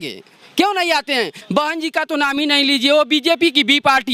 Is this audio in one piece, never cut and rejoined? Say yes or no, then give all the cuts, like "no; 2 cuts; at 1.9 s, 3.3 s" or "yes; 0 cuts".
no; 1 cut; at 1.4 s